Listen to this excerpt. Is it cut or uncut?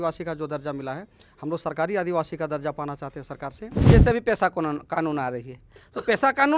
cut